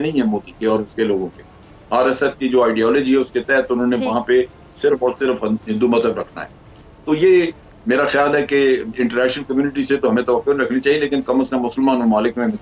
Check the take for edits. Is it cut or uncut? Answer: uncut